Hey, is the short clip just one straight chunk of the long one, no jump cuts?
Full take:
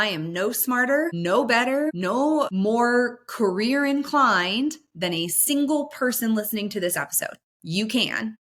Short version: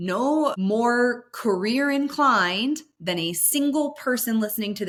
yes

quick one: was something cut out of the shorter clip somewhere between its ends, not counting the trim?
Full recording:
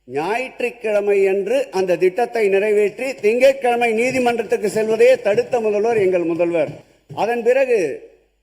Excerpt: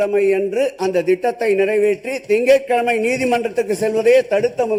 no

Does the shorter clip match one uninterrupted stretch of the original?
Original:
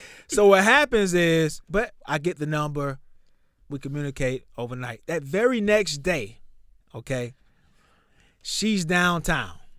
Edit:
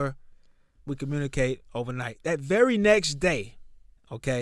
yes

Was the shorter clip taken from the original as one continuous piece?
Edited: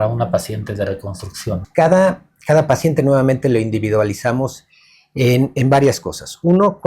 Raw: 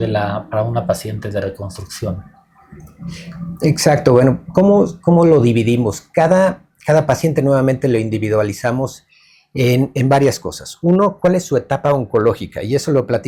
no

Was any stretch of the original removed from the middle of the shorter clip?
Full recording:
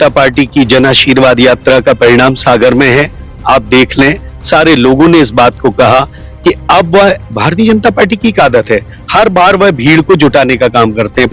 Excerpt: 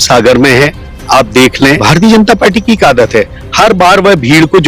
yes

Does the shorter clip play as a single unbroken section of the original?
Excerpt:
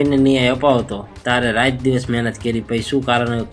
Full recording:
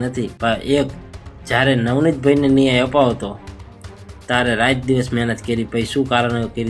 no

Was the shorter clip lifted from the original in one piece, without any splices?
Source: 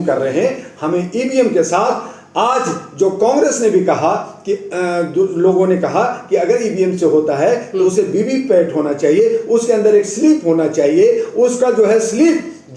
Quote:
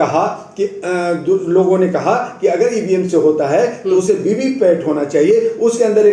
yes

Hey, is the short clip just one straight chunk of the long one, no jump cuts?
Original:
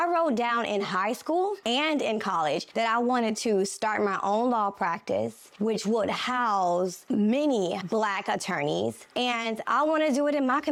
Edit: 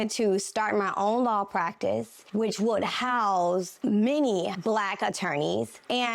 yes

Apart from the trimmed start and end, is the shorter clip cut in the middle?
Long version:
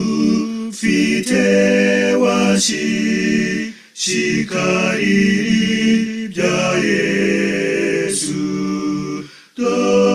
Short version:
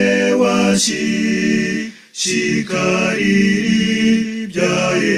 no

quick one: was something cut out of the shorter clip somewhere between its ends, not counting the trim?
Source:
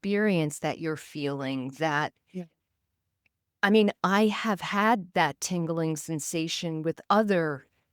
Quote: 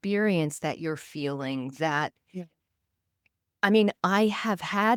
no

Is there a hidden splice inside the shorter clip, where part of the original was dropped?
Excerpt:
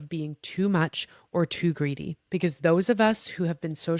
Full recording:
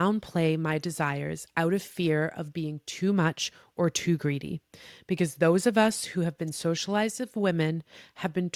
yes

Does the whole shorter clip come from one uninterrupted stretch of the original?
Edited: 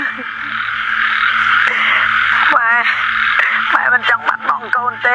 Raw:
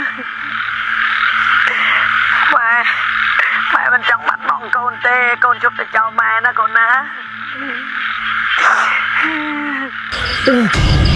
yes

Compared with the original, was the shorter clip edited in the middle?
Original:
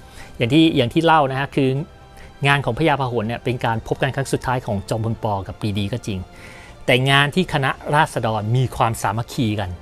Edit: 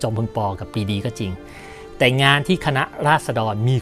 no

